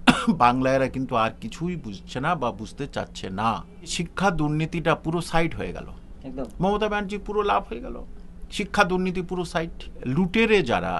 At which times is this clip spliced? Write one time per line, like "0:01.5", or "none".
0:04.0
0:10.0